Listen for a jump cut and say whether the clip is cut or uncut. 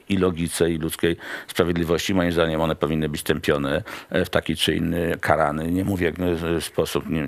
uncut